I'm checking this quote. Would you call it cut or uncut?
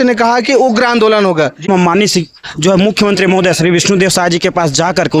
cut